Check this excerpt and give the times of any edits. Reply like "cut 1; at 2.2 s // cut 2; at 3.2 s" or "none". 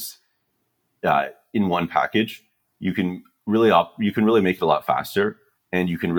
none